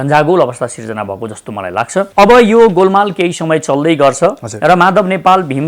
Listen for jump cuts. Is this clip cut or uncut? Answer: cut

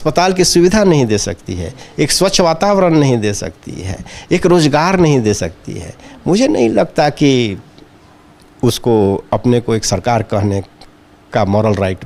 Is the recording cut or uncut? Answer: uncut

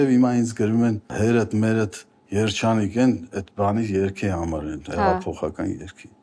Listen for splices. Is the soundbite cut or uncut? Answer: cut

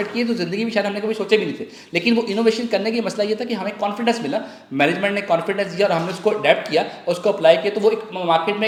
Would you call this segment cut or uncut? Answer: uncut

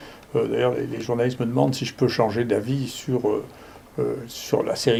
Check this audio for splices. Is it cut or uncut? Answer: uncut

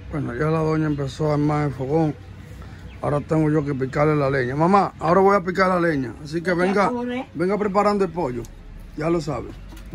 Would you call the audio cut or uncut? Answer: uncut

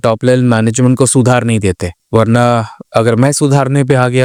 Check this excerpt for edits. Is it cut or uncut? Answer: uncut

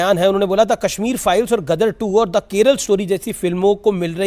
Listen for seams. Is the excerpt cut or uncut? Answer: uncut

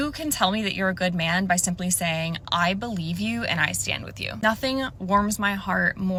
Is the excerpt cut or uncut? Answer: uncut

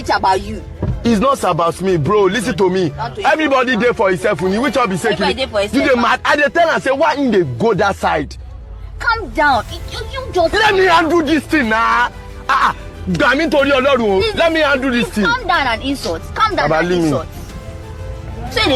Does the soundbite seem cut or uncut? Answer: uncut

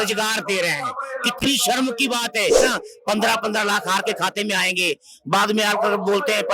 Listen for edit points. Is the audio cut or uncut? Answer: cut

